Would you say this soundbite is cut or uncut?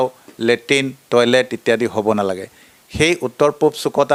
uncut